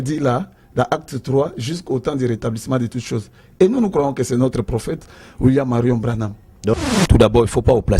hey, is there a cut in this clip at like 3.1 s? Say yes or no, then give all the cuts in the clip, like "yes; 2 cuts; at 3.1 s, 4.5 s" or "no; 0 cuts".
no; 1 cut; at 6.8 s